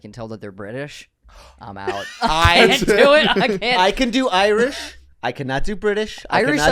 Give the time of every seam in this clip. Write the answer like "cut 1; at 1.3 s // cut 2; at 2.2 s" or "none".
none